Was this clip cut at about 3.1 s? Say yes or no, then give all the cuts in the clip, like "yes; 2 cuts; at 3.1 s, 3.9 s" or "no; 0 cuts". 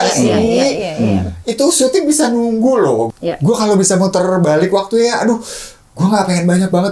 yes; 1 cut; at 3.1 s